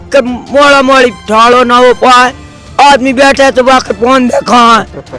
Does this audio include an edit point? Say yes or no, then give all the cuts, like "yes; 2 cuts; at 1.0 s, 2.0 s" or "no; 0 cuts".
no; 0 cuts